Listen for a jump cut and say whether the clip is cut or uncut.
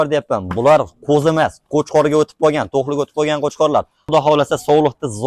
cut